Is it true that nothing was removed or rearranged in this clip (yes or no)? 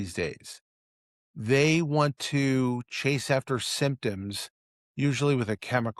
yes